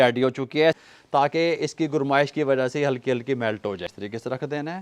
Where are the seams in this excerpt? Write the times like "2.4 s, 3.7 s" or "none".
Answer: 0.8 s, 3.9 s